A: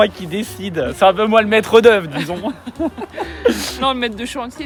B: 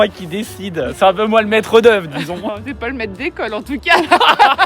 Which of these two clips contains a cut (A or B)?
B